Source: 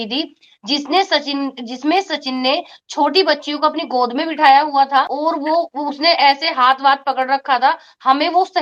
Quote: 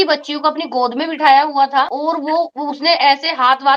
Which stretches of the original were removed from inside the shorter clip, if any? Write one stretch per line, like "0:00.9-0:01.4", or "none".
none